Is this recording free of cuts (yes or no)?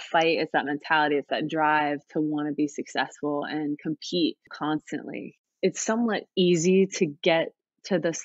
no